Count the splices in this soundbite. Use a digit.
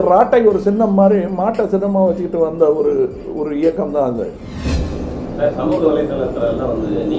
1